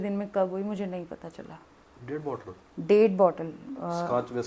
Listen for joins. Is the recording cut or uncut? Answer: uncut